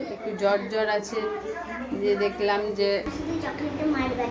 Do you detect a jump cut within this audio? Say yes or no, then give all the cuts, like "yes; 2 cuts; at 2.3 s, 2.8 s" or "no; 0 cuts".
yes; 1 cut; at 3.1 s